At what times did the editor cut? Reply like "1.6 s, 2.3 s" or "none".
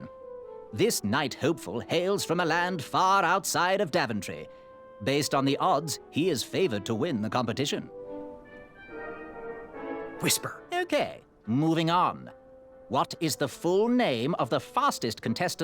7.9 s, 10.4 s